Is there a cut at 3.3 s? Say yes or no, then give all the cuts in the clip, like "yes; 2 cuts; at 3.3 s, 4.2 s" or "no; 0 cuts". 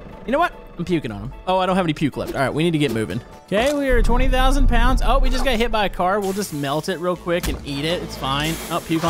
yes; 1 cut; at 3.3 s